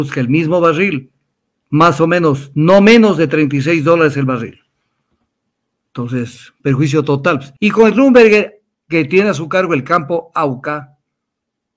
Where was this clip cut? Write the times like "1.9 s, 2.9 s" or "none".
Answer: 7.5 s